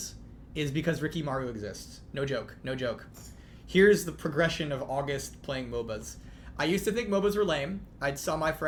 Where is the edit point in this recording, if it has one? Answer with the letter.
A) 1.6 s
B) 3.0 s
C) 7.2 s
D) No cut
D